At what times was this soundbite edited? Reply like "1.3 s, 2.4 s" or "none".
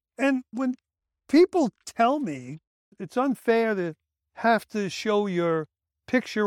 3.0 s